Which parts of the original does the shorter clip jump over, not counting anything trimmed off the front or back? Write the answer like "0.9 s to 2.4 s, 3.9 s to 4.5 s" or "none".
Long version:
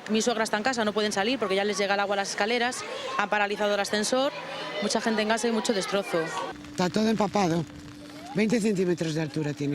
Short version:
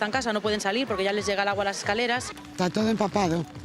2.9 s to 6.6 s